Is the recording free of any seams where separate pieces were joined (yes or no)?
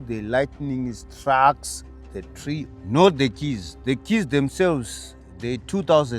no